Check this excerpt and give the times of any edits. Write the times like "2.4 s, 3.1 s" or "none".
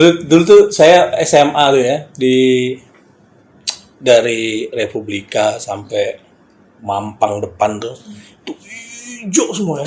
none